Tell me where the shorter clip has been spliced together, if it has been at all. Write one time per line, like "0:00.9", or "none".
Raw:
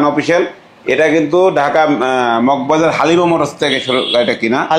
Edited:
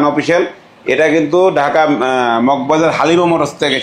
none